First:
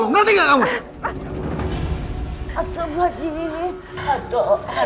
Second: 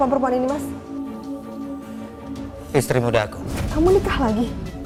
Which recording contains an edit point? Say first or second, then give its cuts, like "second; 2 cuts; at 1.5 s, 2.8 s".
first; 1 cut; at 3.9 s